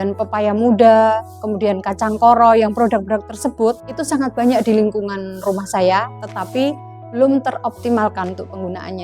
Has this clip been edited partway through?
yes; 1 cut; at 3.9 s

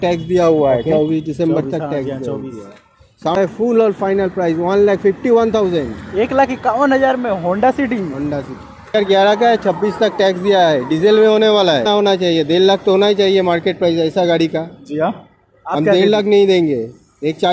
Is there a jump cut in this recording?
yes; 3 cuts; at 3.4 s, 8.9 s, 11.9 s

